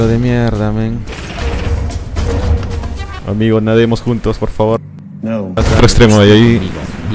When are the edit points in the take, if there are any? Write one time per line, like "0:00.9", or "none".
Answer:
0:05.8

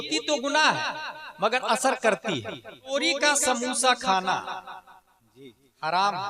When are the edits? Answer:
0:02.9

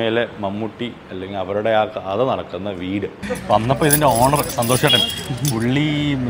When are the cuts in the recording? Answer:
0:03.2

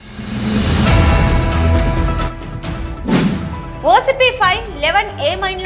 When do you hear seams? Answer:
0:03.6

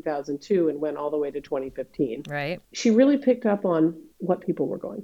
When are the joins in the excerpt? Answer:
0:02.6

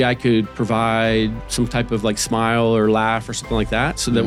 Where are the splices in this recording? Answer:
none

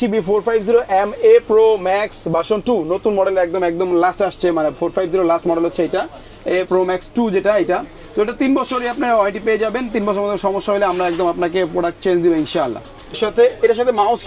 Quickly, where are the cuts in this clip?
0:13.2

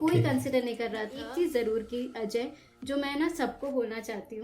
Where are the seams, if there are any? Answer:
0:01.2

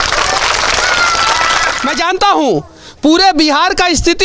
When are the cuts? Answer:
0:01.9

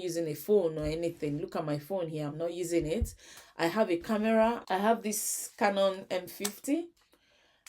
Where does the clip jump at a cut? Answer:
0:04.6

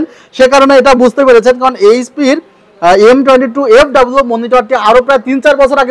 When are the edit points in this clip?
none

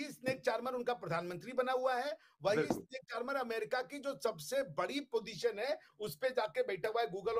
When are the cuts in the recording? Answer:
none

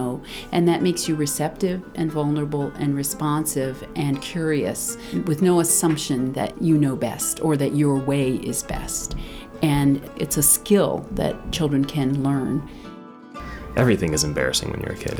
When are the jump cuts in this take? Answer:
0:05.0
0:06.5
0:10.1
0:11.4
0:13.1

